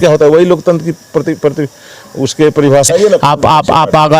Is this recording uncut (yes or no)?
no